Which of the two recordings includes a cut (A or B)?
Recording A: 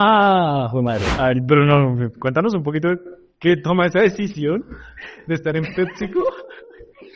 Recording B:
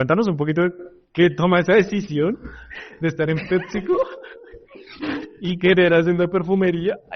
A